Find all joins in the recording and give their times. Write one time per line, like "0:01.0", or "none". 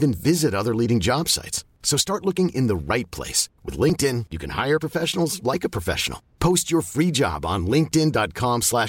none